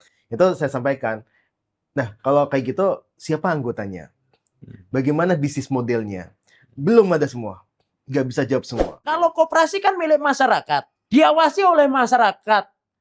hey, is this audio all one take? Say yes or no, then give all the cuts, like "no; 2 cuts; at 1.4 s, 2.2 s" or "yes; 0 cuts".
no; 2 cuts; at 9.0 s, 10.9 s